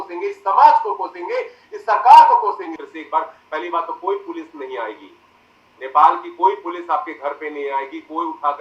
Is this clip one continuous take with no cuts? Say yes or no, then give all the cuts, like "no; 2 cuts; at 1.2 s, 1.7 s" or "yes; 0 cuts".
no; 1 cut; at 2.9 s